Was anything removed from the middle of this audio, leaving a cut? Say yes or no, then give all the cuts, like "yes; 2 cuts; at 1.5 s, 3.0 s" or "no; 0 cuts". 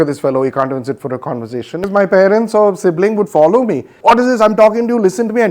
yes; 2 cuts; at 1.8 s, 3.9 s